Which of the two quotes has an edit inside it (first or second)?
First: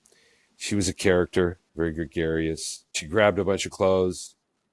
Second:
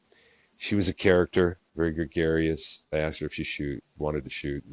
first